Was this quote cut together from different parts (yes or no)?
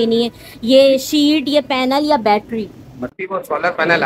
yes